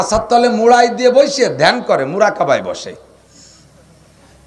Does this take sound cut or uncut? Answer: uncut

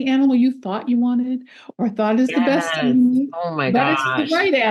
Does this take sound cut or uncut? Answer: uncut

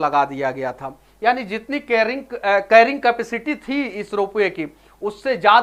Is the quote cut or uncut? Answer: uncut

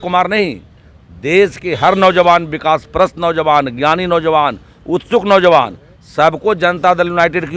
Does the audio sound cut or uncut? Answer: uncut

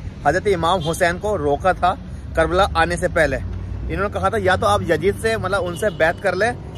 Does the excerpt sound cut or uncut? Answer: uncut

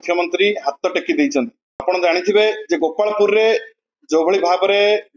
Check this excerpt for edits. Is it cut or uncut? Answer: cut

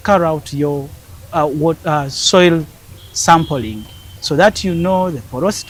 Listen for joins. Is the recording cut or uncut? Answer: uncut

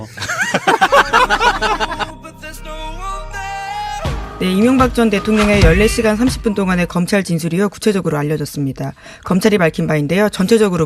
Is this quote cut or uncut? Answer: cut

